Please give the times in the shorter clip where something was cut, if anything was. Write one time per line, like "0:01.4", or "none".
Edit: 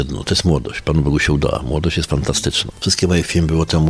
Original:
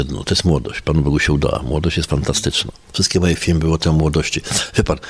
0:02.7